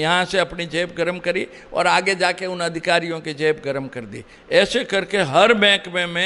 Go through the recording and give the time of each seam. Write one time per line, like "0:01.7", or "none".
none